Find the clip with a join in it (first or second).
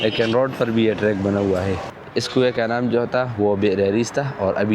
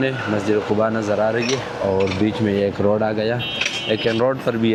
first